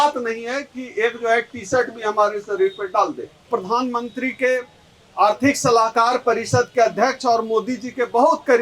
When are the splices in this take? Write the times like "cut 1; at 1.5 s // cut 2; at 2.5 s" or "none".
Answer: cut 1; at 3.5 s